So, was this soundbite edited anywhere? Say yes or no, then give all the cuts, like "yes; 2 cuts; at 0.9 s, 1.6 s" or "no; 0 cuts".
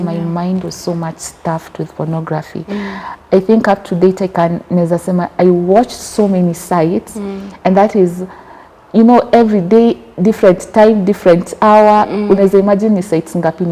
no; 0 cuts